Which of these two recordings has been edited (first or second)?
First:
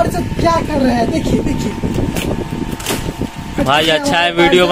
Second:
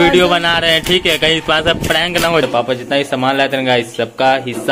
second